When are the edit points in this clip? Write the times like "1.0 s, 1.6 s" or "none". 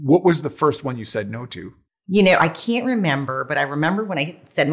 none